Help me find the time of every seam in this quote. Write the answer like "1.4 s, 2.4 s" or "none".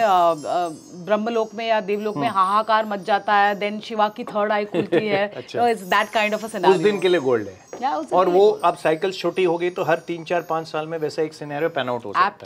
none